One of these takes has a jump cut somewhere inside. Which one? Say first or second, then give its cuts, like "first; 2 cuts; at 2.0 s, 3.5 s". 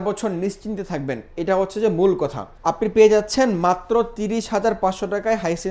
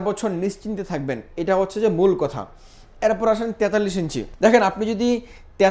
first; 1 cut; at 2.5 s